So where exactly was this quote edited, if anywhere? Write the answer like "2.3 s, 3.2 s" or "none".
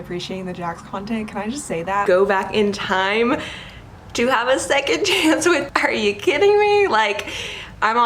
2.0 s, 5.7 s